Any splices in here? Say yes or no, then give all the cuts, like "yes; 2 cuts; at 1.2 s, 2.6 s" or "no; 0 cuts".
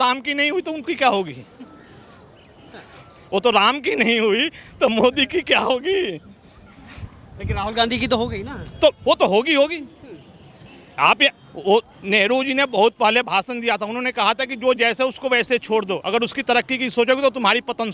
no; 0 cuts